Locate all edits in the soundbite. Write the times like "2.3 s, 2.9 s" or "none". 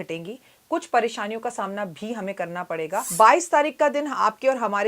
3.1 s